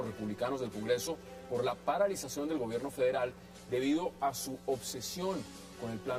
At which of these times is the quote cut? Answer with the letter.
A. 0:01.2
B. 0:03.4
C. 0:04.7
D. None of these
B